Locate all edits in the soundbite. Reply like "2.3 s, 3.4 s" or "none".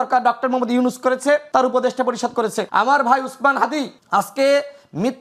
1.5 s, 2.6 s, 4.0 s